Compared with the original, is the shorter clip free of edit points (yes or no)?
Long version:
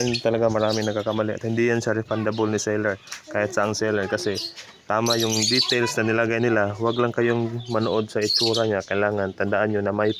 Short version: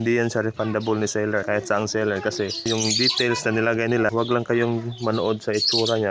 no